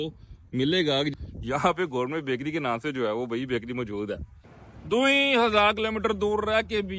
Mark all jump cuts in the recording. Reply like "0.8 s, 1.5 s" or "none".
none